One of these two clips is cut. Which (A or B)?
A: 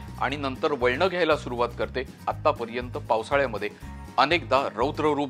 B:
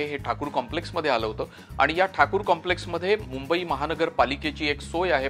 A